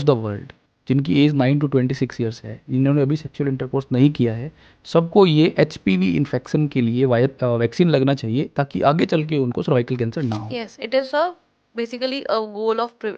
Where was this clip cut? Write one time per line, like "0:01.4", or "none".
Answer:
none